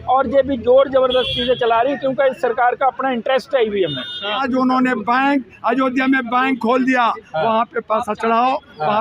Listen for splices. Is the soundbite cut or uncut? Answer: cut